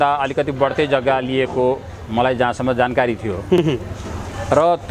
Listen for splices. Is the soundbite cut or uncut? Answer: uncut